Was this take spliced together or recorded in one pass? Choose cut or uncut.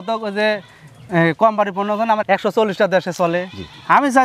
cut